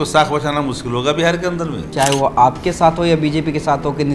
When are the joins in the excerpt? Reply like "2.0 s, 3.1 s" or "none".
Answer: 1.9 s